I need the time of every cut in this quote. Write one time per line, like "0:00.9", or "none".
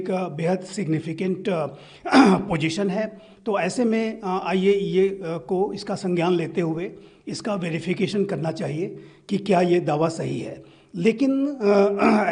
none